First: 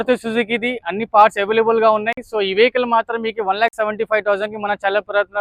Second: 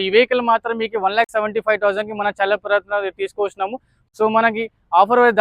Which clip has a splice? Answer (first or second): second